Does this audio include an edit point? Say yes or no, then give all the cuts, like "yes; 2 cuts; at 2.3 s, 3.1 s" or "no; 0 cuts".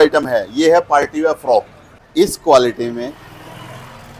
yes; 1 cut; at 2.0 s